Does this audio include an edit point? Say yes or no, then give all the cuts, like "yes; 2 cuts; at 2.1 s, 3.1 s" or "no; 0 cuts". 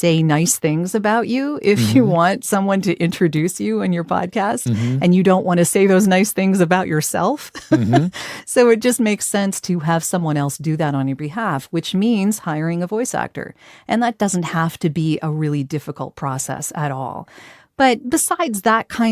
yes; 2 cuts; at 14.1 s, 18.0 s